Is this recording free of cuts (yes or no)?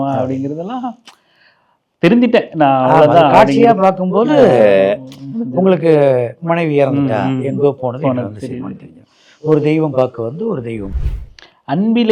no